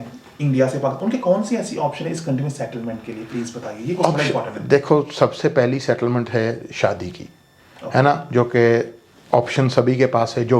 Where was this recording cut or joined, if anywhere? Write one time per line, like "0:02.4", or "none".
none